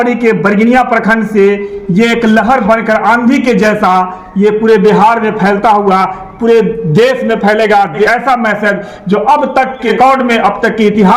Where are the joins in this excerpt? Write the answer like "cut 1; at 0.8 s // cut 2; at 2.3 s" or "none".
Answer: cut 1; at 8.1 s // cut 2; at 9.9 s